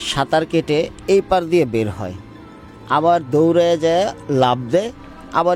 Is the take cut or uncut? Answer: uncut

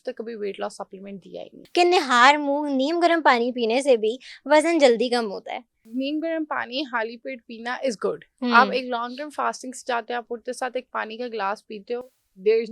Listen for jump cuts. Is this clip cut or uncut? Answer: cut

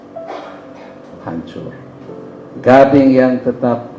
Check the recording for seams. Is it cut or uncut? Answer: cut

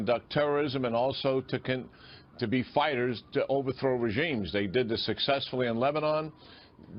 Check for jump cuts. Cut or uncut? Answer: uncut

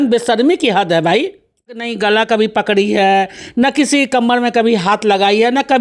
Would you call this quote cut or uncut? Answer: cut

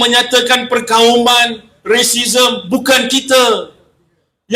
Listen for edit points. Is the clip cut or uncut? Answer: uncut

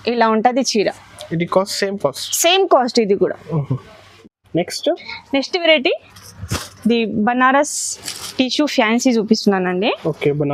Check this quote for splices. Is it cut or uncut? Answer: uncut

